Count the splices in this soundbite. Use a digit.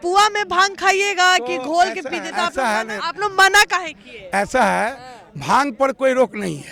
1